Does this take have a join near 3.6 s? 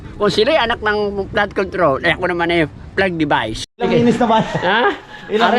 yes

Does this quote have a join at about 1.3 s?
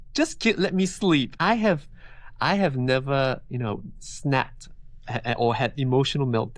yes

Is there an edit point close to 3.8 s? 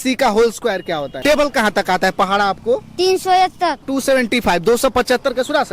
yes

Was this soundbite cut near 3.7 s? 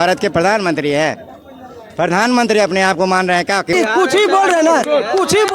yes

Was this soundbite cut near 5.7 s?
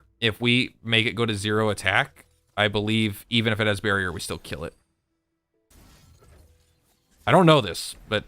yes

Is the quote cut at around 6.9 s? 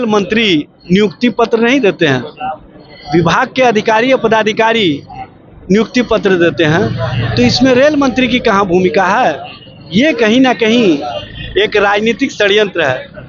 no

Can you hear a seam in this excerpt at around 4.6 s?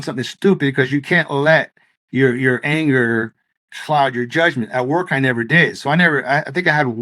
no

